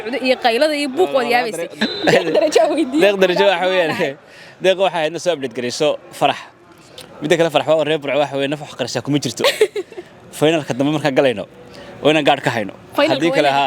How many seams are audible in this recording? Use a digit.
1